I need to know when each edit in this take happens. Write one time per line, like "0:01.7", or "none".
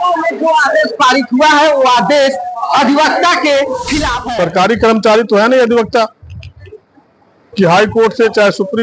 0:04.2